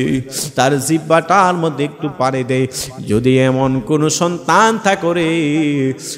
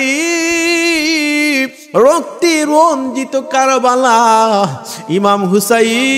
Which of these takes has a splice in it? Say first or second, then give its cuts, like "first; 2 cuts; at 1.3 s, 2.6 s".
second; 1 cut; at 1.8 s